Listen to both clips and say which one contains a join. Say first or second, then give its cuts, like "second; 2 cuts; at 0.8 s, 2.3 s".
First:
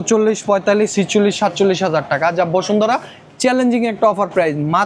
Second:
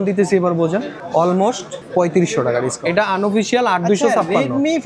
second; 3 cuts; at 1.0 s, 1.7 s, 2.7 s